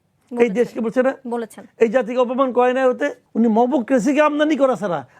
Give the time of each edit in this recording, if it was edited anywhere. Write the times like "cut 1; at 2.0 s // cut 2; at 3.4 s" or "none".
cut 1; at 3.2 s

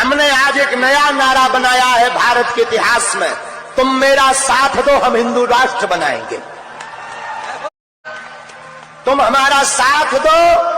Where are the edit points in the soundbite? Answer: cut 1; at 7.7 s

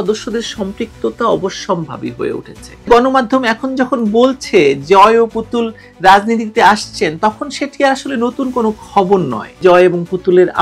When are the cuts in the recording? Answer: cut 1; at 2.9 s // cut 2; at 9.6 s

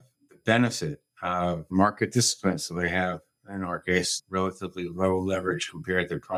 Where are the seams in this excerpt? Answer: none

